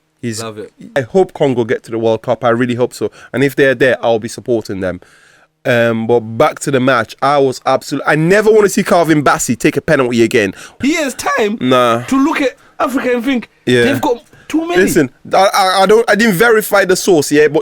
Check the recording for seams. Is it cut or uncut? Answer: cut